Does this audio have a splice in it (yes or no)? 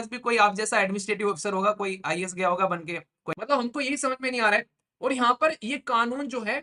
yes